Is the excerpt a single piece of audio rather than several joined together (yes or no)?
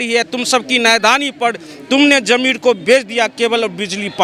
yes